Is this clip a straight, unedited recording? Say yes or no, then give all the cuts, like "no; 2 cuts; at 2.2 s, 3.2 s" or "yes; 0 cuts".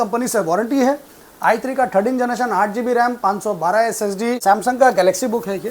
no; 1 cut; at 4.4 s